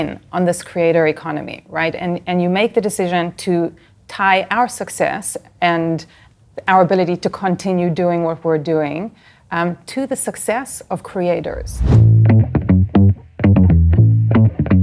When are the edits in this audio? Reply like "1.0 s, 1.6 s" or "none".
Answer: 11.8 s